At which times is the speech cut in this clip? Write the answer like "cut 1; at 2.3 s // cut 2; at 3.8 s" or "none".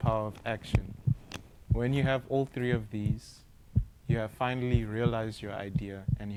none